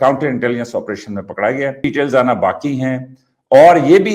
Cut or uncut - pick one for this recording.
cut